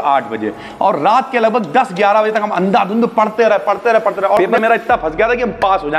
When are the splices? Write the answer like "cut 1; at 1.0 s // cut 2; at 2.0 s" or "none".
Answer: cut 1; at 4.6 s